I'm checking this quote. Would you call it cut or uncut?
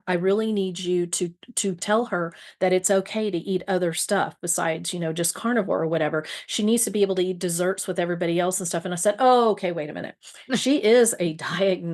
uncut